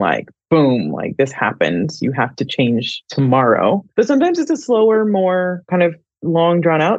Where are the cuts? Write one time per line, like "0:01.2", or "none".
0:03.9